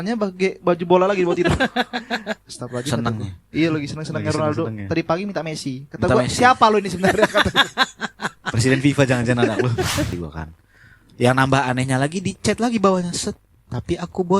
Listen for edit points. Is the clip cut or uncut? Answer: cut